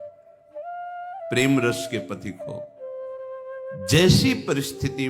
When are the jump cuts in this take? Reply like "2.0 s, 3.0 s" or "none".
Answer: 1.3 s